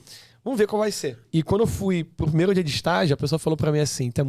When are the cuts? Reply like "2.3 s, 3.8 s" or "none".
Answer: 1.1 s